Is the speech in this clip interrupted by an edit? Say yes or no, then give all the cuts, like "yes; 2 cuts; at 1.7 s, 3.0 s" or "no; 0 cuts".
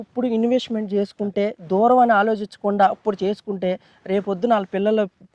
no; 0 cuts